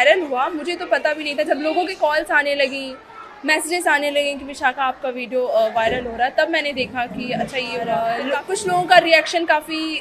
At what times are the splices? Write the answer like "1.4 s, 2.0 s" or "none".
8.0 s